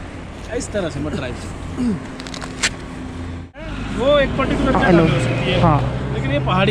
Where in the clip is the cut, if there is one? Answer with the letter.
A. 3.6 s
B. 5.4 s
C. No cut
A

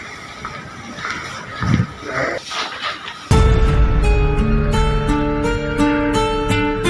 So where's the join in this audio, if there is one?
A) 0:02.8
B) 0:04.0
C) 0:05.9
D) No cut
D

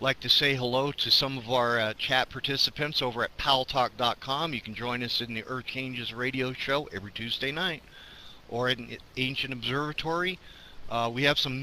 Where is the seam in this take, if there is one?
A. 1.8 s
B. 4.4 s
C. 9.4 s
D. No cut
C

